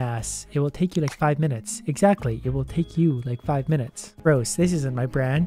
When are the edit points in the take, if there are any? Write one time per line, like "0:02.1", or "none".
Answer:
0:04.1